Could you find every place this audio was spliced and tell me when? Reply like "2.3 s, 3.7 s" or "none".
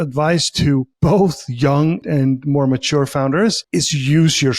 0.9 s, 2.0 s, 3.6 s